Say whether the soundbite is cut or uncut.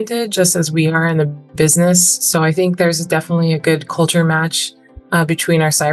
uncut